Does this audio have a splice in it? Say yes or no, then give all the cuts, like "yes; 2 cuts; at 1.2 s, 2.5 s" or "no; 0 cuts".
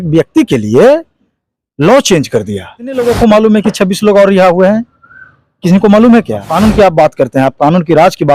yes; 2 cuts; at 3.0 s, 6.5 s